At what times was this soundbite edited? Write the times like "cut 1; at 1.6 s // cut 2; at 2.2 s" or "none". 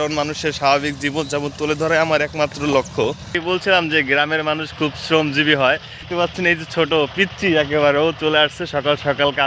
cut 1; at 3.3 s // cut 2; at 6.0 s